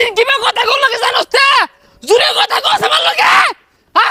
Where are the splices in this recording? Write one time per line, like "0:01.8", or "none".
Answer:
none